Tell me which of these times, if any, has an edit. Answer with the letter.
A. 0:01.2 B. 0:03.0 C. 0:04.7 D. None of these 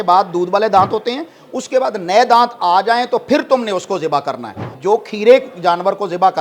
C